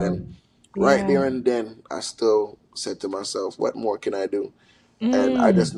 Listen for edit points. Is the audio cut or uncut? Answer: uncut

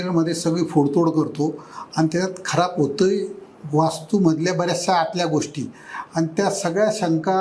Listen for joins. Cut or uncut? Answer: uncut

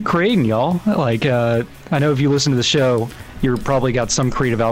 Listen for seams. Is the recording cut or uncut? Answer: uncut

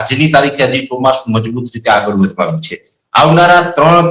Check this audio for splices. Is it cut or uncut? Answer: uncut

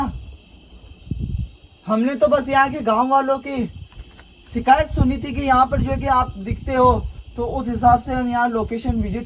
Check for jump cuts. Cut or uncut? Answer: uncut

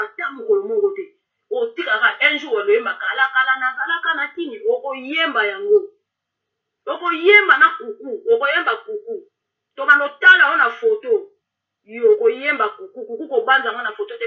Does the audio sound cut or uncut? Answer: uncut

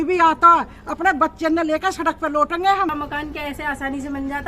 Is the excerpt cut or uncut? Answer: cut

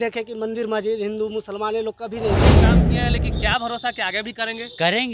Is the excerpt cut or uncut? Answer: cut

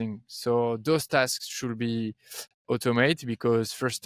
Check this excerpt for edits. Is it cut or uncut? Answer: uncut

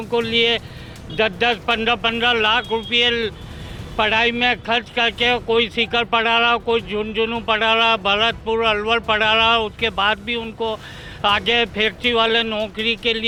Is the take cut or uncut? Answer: uncut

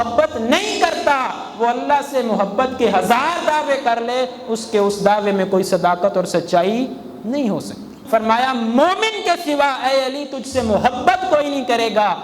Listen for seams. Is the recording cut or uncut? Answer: cut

